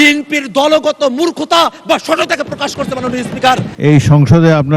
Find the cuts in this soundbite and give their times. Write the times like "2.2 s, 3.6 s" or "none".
3.7 s